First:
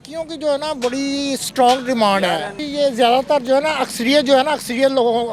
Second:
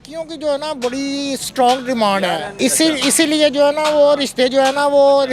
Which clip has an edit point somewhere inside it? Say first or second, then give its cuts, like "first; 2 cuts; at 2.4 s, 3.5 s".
first; 1 cut; at 2.5 s